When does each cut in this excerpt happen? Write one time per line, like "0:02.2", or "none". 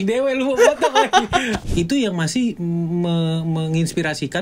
0:01.6